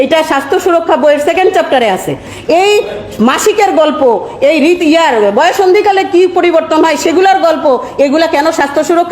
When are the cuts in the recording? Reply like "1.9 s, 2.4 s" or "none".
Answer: 2.3 s